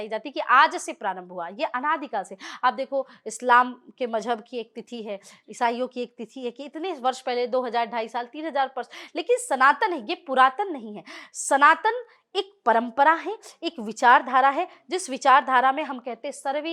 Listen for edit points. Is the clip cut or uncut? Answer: uncut